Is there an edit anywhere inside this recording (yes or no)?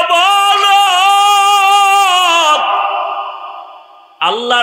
no